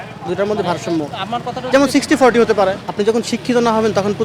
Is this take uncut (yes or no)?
no